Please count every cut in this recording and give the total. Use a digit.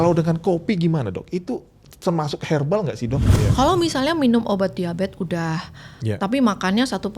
1